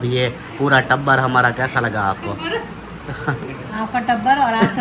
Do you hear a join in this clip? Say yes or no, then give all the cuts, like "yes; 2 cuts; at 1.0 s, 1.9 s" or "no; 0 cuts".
no; 0 cuts